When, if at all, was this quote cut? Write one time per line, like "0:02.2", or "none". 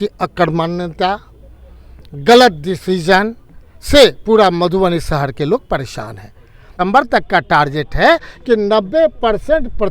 0:06.7